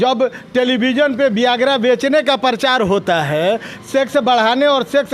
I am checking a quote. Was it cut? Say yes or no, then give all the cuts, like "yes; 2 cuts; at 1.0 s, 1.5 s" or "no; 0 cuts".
no; 0 cuts